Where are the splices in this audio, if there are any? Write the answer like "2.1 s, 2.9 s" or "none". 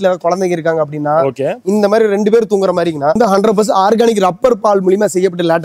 3.2 s